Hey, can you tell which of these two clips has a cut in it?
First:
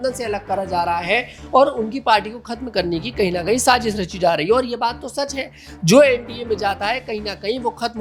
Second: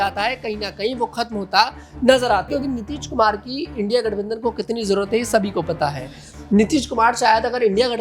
second; 1 cut; at 2.5 s

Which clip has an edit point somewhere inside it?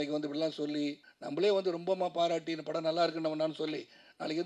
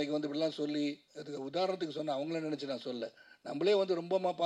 first; 1 cut; at 1.1 s

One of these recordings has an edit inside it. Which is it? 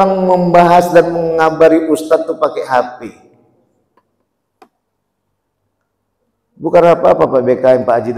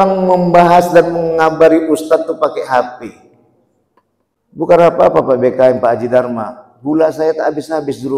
second; 1 cut; at 4.7 s

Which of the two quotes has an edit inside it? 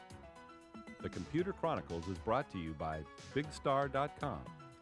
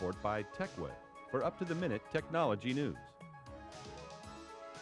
first; 1 cut; at 1.0 s

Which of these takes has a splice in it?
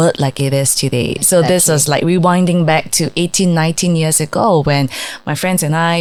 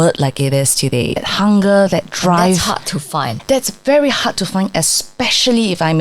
second; 2 cuts; at 1.2 s, 3.3 s

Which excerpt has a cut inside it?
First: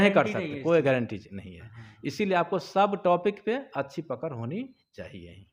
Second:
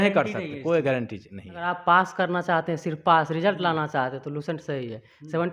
second; 1 cut; at 1.6 s

